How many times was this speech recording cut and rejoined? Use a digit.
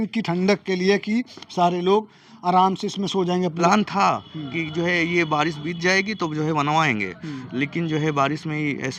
1